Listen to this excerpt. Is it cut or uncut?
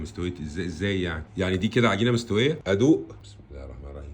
cut